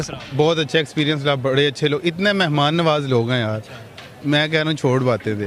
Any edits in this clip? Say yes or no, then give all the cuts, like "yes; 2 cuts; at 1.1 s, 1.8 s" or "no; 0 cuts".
no; 0 cuts